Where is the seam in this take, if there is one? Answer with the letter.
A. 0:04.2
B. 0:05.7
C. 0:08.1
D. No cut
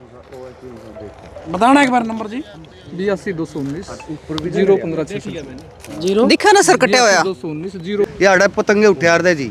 C